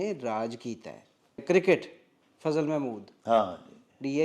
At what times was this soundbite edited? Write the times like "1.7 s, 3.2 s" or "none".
1.4 s